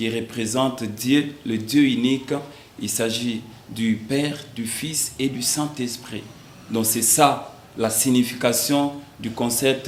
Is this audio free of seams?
yes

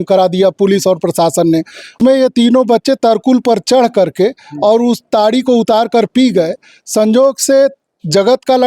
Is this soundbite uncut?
no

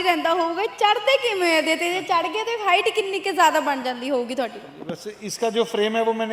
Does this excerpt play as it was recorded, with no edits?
yes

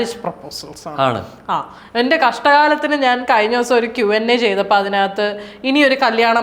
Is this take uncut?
yes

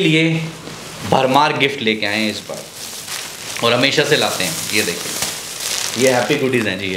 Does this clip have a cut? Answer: no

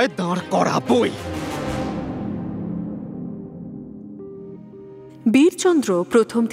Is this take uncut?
yes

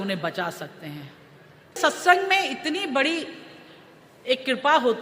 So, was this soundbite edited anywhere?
yes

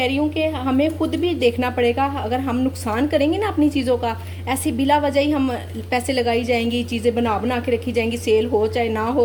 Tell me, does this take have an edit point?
no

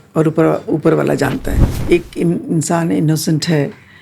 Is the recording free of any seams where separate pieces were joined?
no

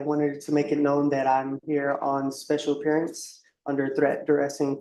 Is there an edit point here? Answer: no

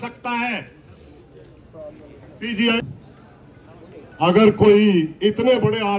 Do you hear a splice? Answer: yes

